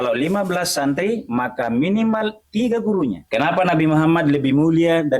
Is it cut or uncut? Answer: cut